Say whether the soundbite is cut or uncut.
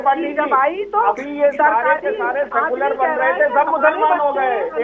uncut